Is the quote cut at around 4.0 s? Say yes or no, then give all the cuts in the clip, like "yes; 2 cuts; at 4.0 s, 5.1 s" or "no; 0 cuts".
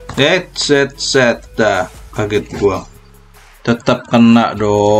no; 0 cuts